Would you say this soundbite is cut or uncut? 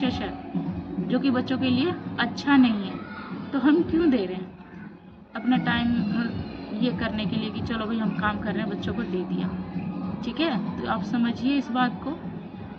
uncut